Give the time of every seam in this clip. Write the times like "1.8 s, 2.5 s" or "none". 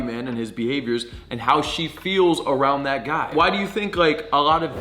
3.3 s